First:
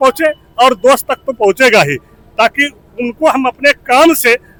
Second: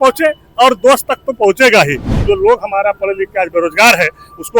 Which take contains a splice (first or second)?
second